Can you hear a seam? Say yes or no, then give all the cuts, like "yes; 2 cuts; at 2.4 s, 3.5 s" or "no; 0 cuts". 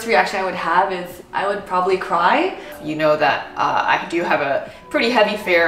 yes; 1 cut; at 2.8 s